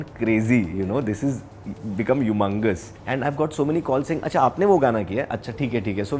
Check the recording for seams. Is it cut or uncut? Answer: cut